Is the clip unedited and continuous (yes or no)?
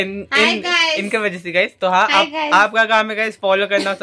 yes